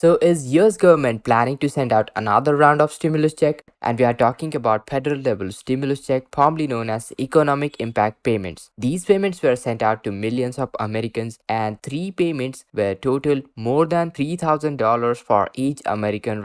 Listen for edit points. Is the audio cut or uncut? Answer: cut